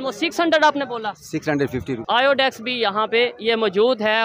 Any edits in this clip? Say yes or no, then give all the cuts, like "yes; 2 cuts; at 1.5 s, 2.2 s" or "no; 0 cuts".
yes; 1 cut; at 2.0 s